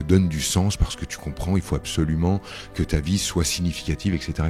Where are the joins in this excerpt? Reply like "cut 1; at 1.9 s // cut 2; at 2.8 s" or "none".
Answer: none